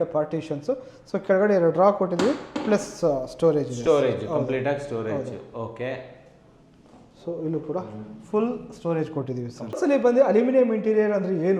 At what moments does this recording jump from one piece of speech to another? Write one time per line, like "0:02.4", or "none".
0:09.8